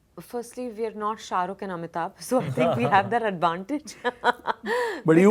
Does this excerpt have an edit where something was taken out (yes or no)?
no